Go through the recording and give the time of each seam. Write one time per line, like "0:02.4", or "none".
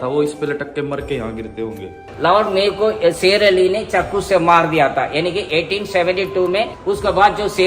0:02.0
0:06.8